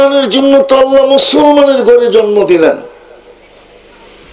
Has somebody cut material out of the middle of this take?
no; 0 cuts

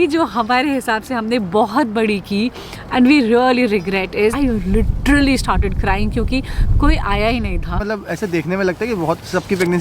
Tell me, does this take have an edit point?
yes; 2 cuts; at 4.4 s, 7.8 s

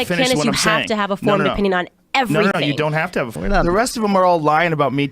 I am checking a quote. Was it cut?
yes; 1 cut; at 3.3 s

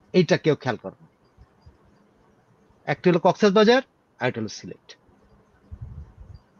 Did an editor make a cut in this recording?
no; 0 cuts

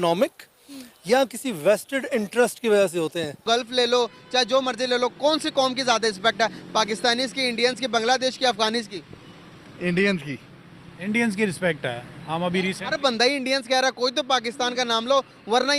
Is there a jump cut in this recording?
yes; 1 cut; at 3.5 s

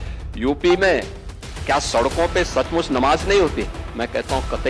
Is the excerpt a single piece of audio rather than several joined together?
yes; 0 cuts

